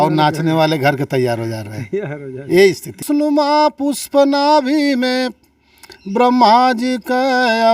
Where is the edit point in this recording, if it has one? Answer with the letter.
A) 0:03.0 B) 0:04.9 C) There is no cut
A